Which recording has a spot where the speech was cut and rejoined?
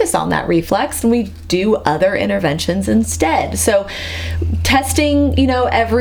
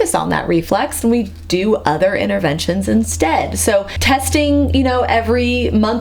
second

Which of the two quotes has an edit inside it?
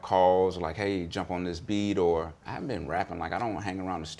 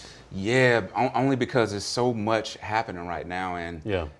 first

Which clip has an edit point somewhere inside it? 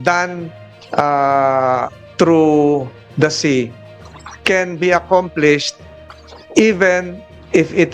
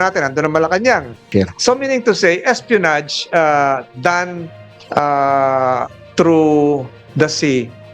second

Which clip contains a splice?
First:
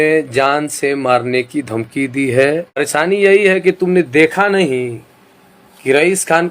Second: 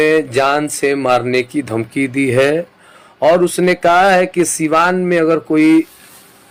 first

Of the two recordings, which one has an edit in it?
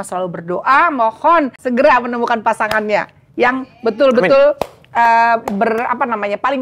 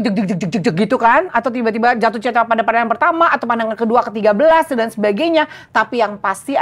first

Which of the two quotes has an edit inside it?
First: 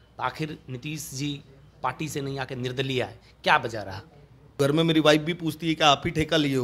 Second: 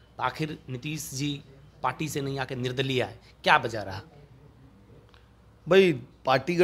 first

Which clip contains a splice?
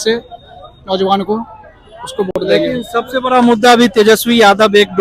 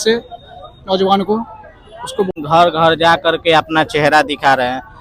second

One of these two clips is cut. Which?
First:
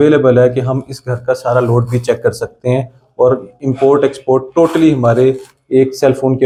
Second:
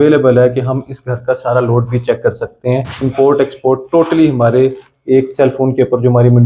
second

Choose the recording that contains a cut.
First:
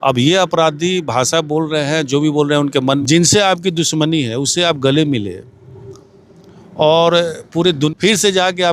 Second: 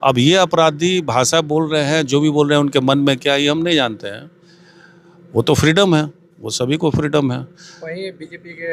first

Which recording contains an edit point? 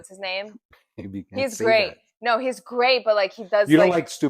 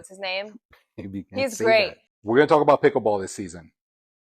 second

